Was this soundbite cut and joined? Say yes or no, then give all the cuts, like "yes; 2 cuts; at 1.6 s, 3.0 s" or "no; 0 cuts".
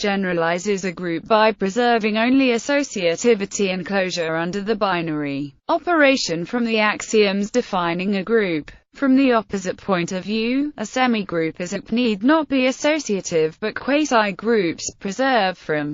no; 0 cuts